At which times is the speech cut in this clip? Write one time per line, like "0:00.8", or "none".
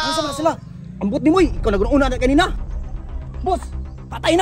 0:02.5